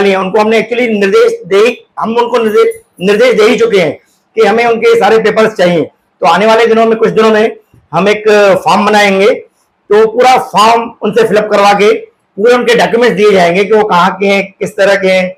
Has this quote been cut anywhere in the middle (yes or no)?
no